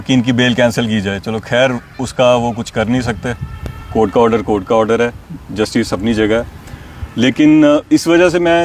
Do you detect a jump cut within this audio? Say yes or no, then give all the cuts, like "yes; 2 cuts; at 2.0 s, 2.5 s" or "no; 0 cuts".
no; 0 cuts